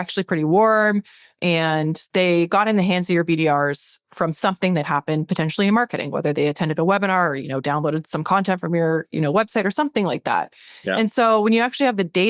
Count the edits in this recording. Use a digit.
1